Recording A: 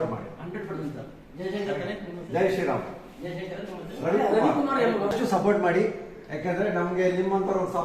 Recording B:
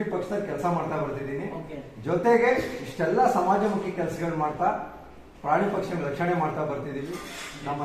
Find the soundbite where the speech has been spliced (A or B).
A